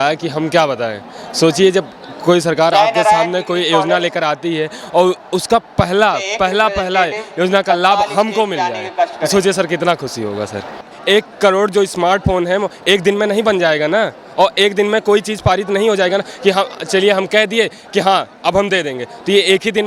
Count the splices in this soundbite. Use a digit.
1